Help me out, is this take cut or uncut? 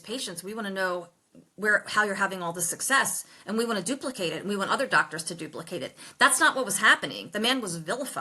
uncut